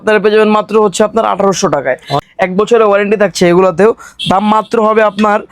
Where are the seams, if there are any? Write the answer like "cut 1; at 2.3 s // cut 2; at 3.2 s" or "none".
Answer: cut 1; at 2.1 s